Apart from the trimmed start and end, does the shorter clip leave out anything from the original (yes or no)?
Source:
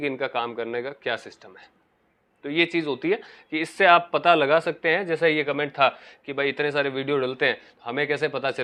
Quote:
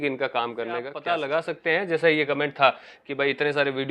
yes